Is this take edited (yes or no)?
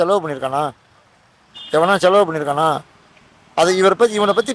no